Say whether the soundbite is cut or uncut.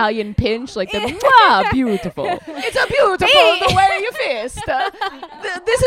cut